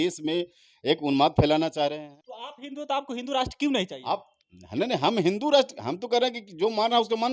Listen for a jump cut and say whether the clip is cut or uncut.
cut